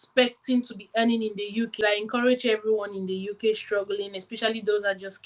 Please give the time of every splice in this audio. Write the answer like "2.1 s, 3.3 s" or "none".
1.7 s